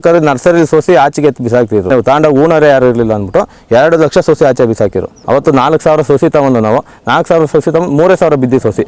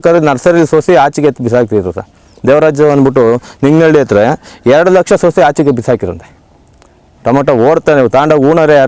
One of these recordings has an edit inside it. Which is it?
first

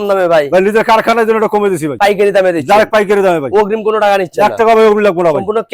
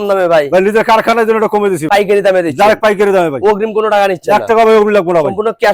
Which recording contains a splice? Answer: second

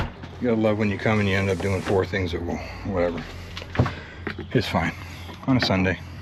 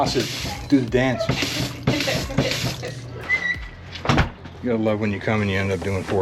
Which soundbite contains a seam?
second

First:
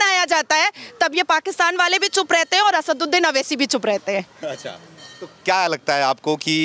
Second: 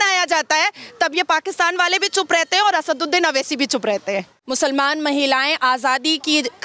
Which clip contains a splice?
second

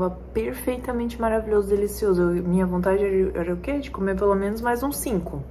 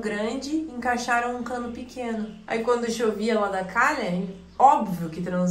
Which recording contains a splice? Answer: second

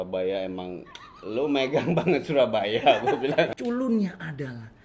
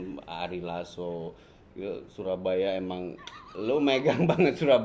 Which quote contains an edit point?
first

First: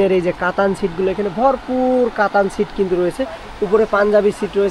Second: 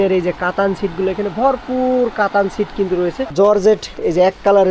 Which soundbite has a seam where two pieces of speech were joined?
second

